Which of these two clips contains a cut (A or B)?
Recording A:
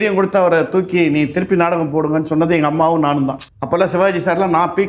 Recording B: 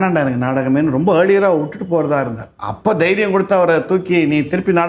A